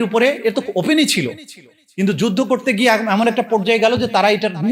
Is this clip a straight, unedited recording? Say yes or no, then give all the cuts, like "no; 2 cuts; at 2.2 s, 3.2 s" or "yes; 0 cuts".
yes; 0 cuts